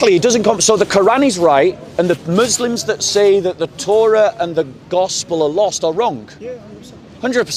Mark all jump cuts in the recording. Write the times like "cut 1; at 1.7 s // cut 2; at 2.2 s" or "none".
none